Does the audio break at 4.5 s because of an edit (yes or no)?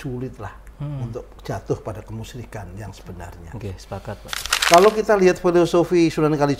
yes